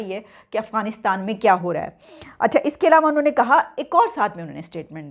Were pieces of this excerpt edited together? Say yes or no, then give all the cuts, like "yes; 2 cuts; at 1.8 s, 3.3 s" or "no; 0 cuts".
no; 0 cuts